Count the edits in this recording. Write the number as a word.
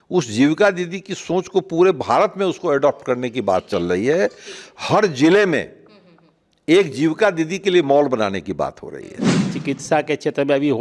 one